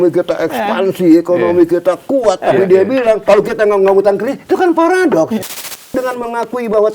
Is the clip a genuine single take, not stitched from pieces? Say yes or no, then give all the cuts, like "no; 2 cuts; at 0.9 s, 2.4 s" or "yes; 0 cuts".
no; 1 cut; at 5.9 s